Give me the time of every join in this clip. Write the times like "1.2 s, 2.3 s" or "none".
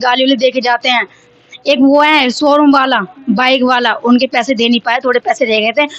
none